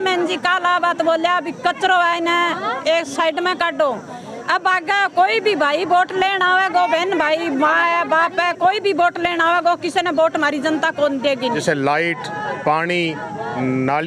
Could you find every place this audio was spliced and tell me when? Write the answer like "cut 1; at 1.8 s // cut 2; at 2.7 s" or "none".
cut 1; at 11.6 s

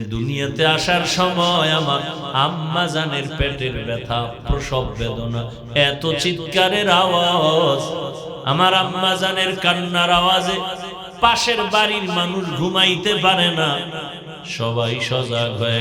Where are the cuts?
none

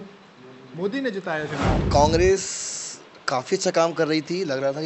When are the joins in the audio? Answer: cut 1; at 1.8 s

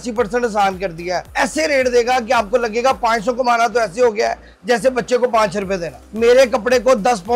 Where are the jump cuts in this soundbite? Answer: cut 1; at 1.2 s // cut 2; at 6.2 s

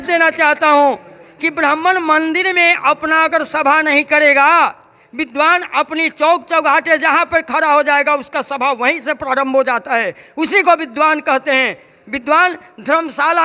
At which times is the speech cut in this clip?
none

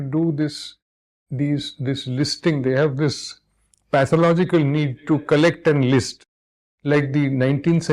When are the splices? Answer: none

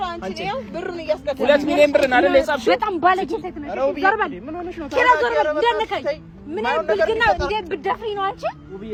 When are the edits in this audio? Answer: none

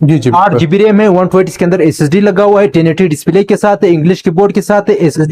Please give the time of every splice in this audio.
none

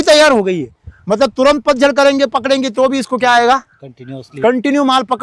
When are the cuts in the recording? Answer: none

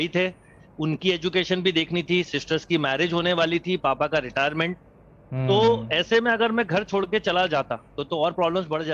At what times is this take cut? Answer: none

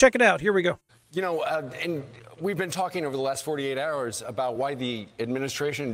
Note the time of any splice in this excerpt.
cut 1; at 0.9 s

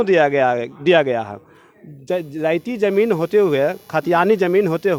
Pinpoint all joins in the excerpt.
none

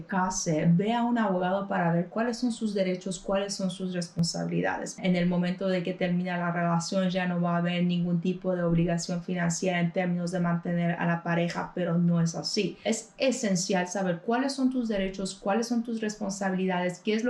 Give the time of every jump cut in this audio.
cut 1; at 4.9 s // cut 2; at 12.8 s

